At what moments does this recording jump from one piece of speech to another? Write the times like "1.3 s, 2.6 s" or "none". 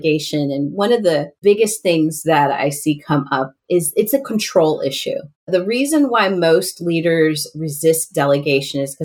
1.3 s, 5.5 s